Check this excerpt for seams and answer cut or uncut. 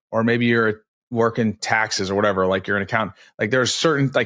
cut